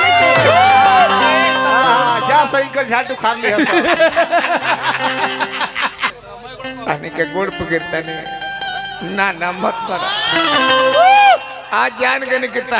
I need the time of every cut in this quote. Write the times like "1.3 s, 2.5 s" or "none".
6.2 s